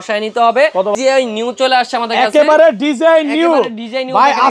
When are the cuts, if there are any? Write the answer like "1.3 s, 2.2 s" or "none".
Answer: 0.9 s